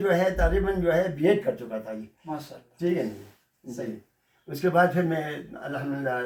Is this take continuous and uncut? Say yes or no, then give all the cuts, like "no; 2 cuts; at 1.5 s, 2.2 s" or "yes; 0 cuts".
yes; 0 cuts